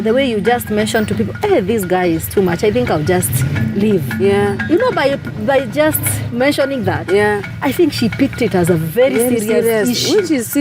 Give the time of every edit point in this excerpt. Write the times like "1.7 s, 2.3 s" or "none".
7.5 s